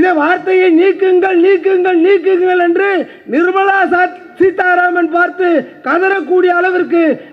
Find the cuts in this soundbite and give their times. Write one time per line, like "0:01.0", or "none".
none